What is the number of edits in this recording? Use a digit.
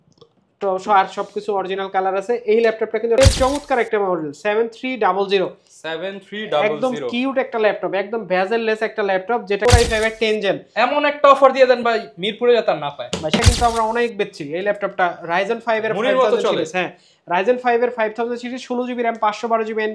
3